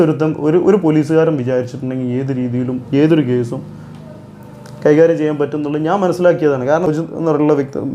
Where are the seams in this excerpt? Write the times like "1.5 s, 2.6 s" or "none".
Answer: 6.9 s